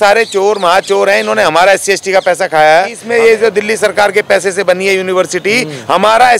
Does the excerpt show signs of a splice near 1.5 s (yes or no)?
no